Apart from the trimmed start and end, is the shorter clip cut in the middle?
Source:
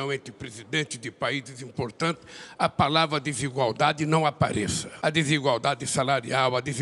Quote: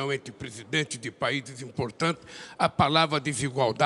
no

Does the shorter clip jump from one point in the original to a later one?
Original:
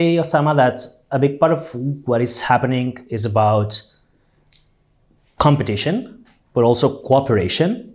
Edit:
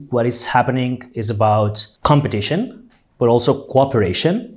yes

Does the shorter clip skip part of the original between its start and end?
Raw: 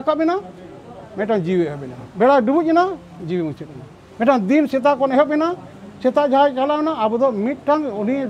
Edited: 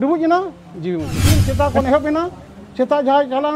yes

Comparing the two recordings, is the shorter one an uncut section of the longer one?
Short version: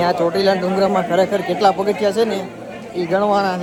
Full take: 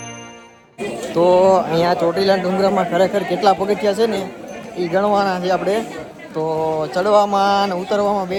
yes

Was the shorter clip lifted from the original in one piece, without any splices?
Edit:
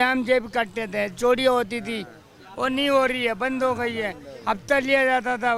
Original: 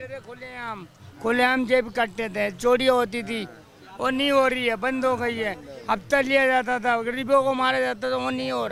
yes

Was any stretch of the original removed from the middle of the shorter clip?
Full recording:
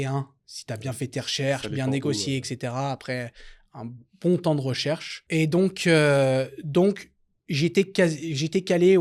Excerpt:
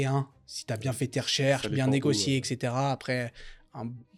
no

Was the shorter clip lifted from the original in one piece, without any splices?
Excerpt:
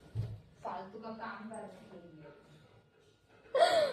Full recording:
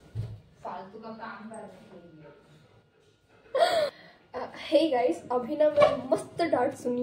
yes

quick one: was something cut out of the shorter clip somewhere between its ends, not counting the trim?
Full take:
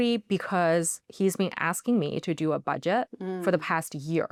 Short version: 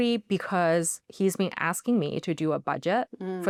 no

